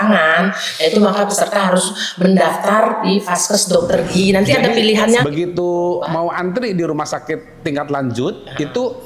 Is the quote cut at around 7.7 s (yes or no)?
no